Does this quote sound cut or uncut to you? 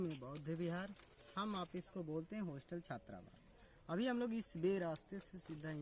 uncut